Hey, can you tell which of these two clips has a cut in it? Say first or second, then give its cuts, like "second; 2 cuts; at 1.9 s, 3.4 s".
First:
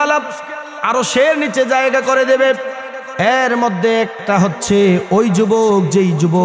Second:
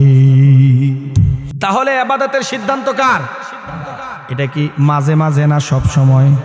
second; 1 cut; at 1.4 s